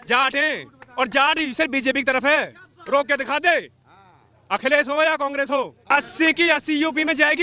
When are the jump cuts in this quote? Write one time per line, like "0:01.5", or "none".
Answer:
0:05.8